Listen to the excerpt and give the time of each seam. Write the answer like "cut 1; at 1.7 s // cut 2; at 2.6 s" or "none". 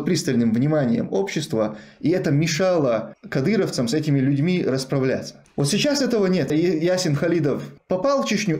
cut 1; at 3.2 s // cut 2; at 6.5 s // cut 3; at 7.7 s